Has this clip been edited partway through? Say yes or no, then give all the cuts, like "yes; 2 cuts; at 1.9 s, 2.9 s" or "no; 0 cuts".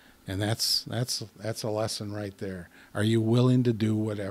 no; 0 cuts